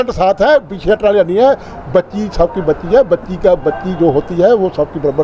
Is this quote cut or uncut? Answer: uncut